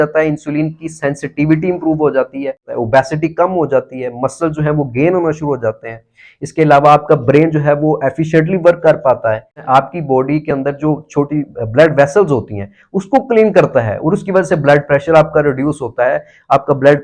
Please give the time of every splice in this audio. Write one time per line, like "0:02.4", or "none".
0:02.7
0:09.6